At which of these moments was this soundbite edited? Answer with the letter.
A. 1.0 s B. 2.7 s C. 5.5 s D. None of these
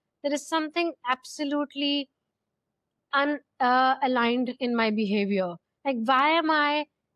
D